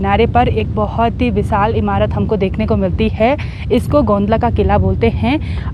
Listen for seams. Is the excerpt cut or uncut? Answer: uncut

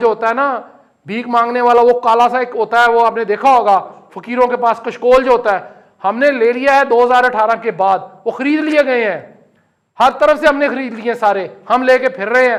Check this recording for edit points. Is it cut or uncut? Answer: uncut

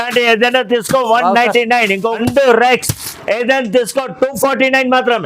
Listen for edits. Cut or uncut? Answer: cut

